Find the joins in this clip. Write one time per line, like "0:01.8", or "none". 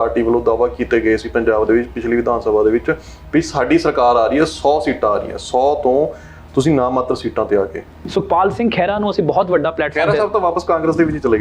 0:08.0